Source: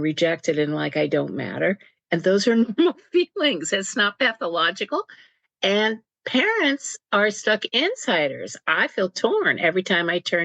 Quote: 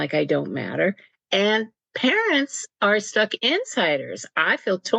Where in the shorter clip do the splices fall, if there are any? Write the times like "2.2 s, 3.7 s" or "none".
1.1 s